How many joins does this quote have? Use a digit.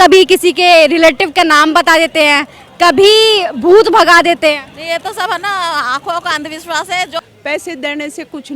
1